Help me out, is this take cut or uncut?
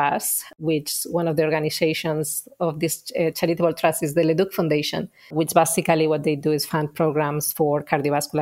uncut